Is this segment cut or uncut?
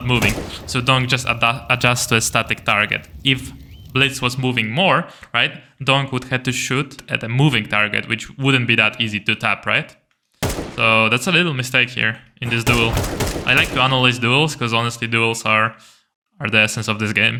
uncut